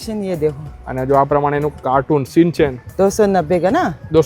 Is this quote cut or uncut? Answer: uncut